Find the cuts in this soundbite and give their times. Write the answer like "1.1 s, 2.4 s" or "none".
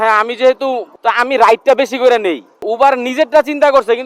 0.9 s, 2.5 s